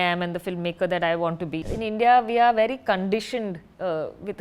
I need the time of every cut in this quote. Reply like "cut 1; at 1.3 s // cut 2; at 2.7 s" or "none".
cut 1; at 1.6 s